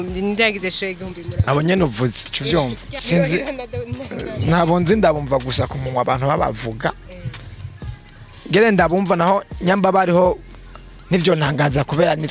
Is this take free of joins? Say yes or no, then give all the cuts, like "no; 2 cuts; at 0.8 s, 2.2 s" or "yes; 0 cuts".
no; 1 cut; at 2.9 s